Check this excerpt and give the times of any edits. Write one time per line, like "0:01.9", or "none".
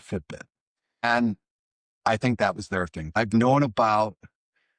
0:01.0
0:03.1